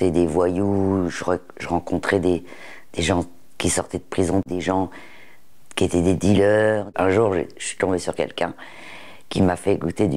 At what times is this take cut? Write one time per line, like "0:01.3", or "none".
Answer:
0:04.4
0:06.9